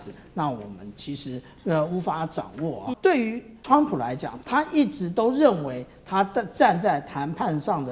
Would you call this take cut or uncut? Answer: cut